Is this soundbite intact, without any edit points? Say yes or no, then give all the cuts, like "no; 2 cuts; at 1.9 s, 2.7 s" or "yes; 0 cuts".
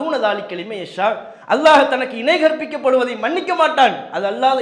yes; 0 cuts